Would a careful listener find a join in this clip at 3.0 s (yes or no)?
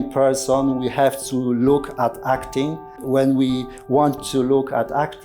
yes